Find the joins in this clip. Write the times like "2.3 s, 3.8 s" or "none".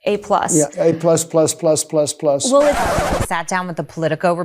2.8 s